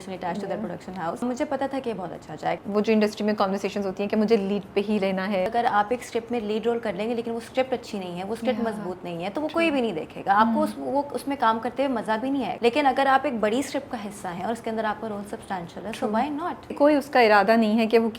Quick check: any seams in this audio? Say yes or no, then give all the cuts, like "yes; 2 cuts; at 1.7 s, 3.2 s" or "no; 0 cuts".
yes; 5 cuts; at 1.2 s, 2.6 s, 5.5 s, 12.5 s, 16.7 s